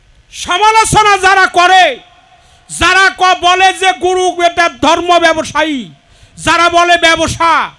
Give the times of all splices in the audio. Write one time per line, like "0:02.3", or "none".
none